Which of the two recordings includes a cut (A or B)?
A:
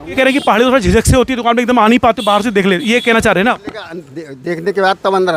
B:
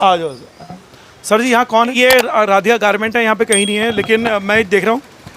B